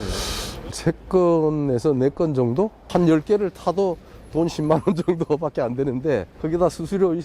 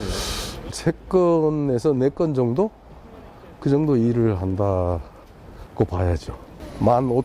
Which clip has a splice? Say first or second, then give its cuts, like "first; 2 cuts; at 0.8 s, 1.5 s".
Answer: first; 2 cuts; at 2.8 s, 6.3 s